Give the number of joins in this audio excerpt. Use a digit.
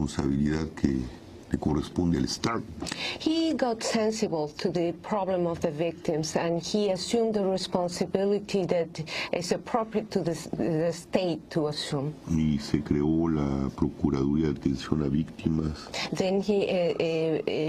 1